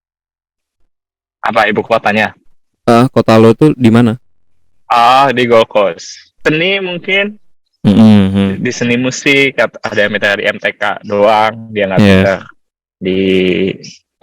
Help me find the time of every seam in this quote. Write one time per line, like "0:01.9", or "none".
0:06.4